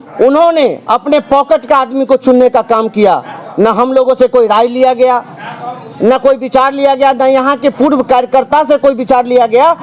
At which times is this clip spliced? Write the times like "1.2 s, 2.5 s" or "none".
none